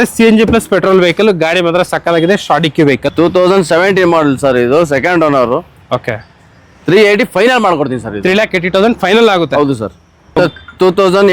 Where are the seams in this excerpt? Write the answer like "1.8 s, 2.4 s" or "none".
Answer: 3.1 s, 10.4 s